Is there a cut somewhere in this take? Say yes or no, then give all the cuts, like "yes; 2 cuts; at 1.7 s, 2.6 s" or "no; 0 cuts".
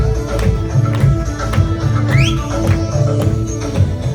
no; 0 cuts